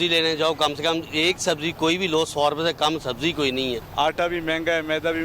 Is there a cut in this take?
yes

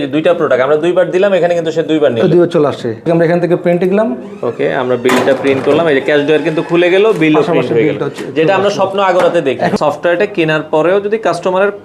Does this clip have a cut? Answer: yes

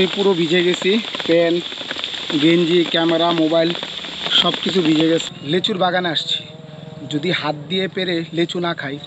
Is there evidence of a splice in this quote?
yes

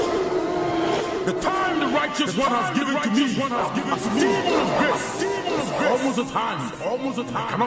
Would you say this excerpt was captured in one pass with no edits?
no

